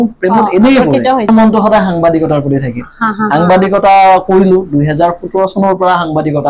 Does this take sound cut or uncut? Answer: cut